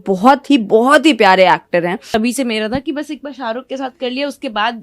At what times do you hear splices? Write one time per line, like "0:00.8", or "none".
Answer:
0:02.0